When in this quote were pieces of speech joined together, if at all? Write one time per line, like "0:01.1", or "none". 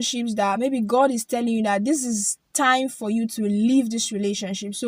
none